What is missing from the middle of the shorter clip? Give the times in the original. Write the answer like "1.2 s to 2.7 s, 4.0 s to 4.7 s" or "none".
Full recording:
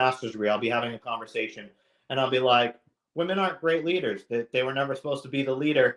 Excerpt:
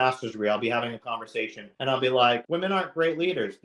1.6 s to 1.9 s, 2.7 s to 3.1 s